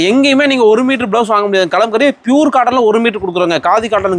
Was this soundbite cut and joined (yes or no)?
no